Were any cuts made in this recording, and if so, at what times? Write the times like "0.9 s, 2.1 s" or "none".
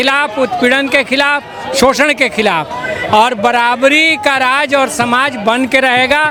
none